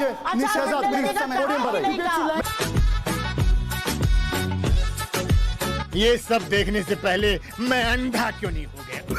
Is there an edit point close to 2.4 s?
yes; 1 cut; at 2.4 s

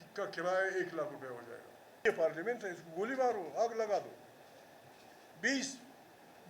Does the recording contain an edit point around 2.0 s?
yes; 1 cut; at 2.0 s

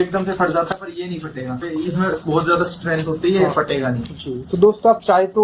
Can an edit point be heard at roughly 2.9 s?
no; 1 cut; at 1.7 s

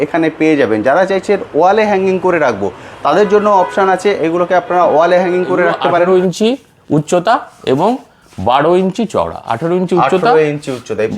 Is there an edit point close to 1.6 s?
no; 1 cut; at 6.0 s

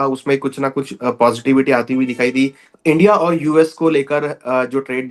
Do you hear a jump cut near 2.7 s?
yes; 1 cut; at 2.7 s

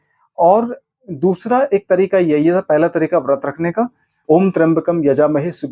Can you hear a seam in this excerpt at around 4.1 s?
yes; 1 cut; at 4.1 s

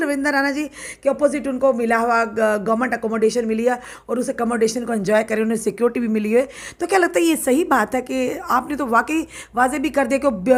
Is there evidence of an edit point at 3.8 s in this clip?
no; 0 cuts

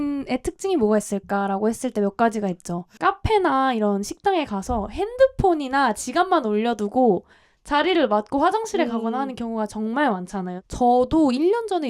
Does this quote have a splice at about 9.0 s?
no; 2 cuts; at 2.9 s, 10.6 s

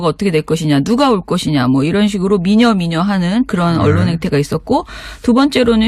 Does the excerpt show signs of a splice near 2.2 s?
no; 1 cut; at 3.8 s

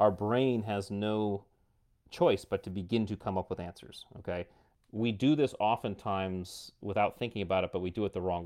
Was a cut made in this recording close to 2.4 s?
no; 1 cut; at 4.6 s

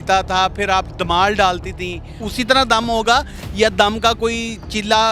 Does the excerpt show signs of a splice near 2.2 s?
yes; 1 cut; at 2.2 s

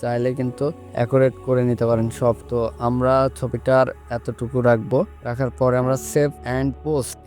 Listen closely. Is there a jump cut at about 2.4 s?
yes; 1 cut; at 2.4 s

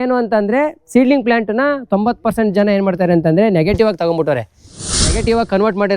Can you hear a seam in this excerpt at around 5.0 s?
yes; 1 cut; at 5.0 s

